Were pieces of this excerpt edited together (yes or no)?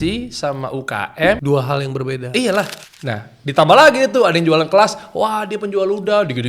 yes